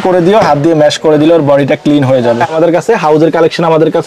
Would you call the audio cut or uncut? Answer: cut